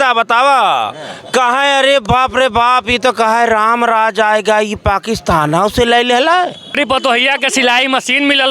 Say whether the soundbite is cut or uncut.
cut